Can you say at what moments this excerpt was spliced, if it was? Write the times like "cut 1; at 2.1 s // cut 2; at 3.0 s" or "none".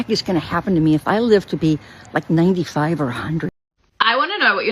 cut 1; at 3.5 s

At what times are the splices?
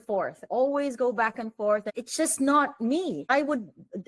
cut 1; at 1.9 s // cut 2; at 3.3 s

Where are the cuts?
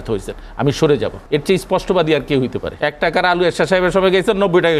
cut 1; at 1.2 s // cut 2; at 2.7 s

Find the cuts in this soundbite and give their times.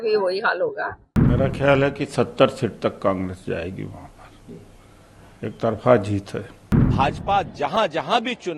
cut 1; at 1.1 s // cut 2; at 6.9 s

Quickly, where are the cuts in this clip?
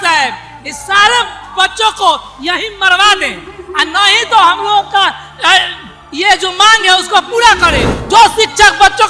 cut 1; at 7.9 s

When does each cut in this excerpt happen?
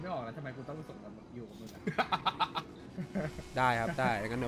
none

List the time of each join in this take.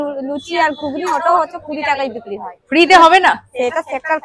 none

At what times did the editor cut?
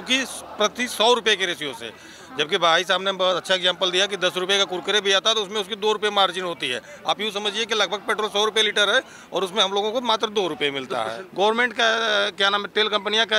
cut 1; at 11.2 s

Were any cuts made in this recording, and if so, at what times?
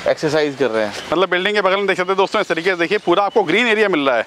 none

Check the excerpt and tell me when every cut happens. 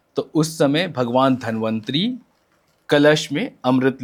none

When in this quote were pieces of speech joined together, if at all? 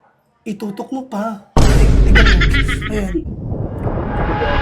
cut 1; at 3.3 s

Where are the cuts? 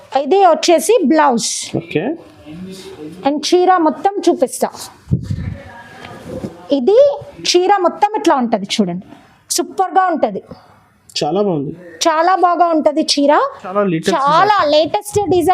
cut 1; at 13.6 s

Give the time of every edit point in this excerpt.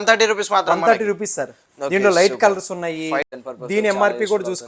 cut 1; at 3.4 s

